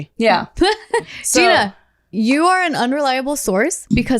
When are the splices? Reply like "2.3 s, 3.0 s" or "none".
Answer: 1.0 s

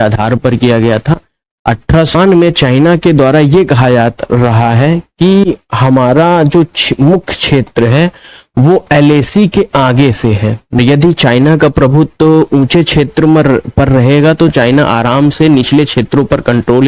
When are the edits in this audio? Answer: 2.1 s, 10.8 s

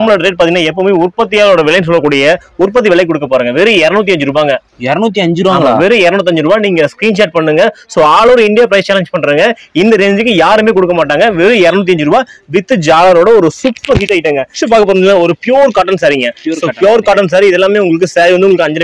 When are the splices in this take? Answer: none

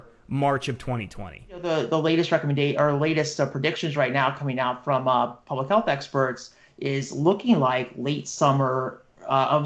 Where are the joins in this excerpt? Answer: 1.6 s

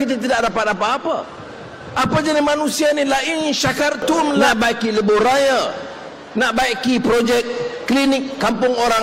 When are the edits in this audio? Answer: 4.5 s

